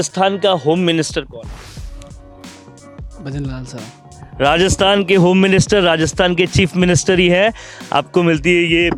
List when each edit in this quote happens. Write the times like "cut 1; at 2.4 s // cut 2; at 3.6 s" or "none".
none